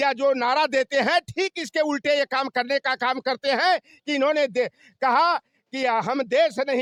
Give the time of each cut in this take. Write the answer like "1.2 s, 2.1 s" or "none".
none